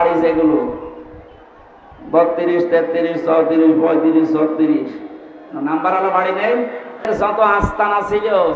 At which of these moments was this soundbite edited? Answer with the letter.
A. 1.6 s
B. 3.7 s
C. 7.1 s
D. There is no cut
C